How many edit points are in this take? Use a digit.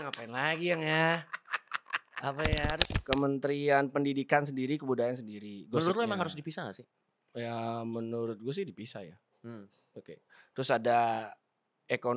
1